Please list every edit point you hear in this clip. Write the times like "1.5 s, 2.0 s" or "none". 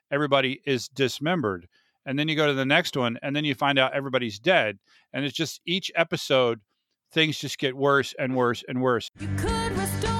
9.1 s